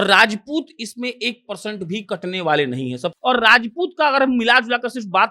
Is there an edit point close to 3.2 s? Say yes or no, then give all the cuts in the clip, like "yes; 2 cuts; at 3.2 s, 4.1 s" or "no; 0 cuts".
yes; 1 cut; at 3.2 s